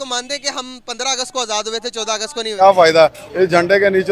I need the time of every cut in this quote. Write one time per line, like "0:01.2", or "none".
0:02.5